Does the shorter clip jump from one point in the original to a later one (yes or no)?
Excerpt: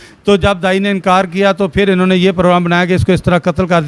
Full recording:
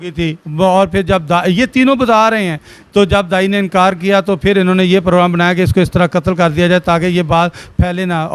no